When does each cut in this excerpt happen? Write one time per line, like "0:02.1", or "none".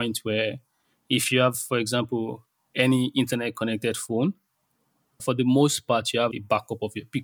0:05.2
0:06.3